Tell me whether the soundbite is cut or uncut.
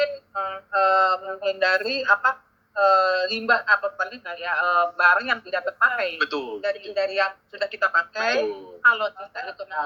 uncut